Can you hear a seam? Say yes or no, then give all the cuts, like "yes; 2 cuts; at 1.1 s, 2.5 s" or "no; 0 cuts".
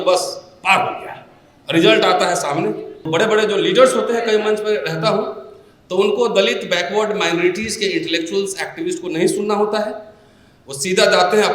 yes; 1 cut; at 3.0 s